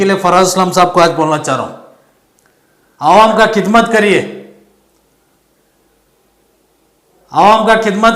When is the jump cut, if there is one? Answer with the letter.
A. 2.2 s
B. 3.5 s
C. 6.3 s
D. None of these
D